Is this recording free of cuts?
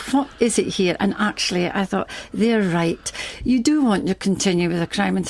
no; 1 cut; at 3.2 s

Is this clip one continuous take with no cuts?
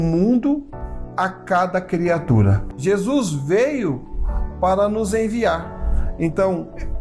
no; 1 cut; at 2.6 s

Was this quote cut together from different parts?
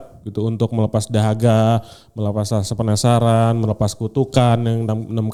no; 0 cuts

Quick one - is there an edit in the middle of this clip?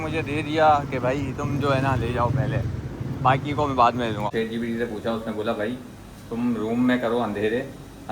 yes; 1 cut; at 4.3 s

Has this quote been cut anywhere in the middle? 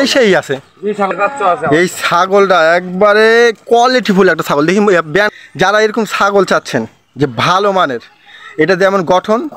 yes; 2 cuts; at 1.1 s, 5.3 s

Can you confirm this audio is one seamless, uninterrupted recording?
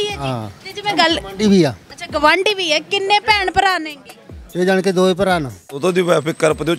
no; 1 cut; at 5.8 s

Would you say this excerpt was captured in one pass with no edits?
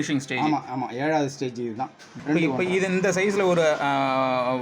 no; 1 cut; at 2.1 s

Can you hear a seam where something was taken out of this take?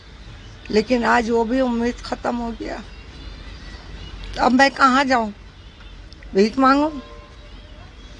no; 0 cuts

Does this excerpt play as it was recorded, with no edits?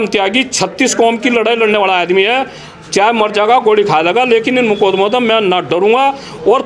yes; 0 cuts

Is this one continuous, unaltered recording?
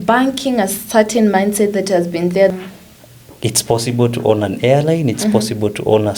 no; 1 cut; at 2.5 s

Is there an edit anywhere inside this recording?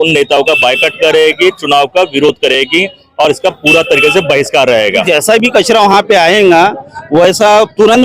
yes; 1 cut; at 5.0 s

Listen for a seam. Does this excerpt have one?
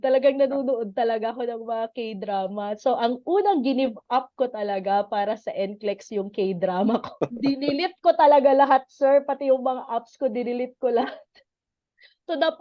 no; 0 cuts

